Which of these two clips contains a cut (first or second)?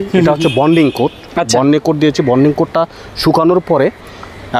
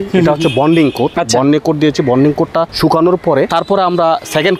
second